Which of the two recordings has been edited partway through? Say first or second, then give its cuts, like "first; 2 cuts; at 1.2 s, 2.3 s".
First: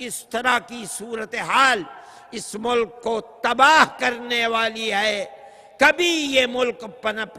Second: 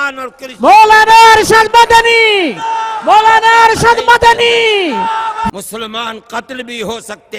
second; 1 cut; at 5.5 s